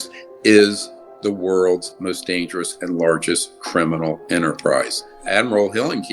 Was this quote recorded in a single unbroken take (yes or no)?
no